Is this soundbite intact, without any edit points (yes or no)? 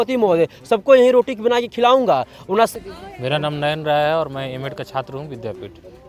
no